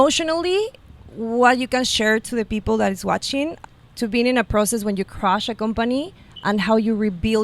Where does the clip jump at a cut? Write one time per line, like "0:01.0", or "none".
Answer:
0:03.6